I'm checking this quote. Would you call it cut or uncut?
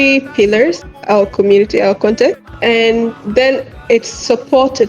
cut